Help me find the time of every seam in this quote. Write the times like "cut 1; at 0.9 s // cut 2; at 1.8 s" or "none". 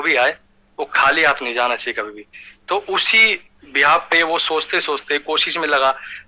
none